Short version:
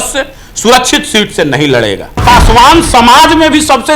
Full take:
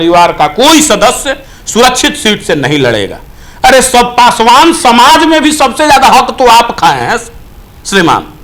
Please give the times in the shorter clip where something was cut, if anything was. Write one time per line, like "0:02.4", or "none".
0:02.2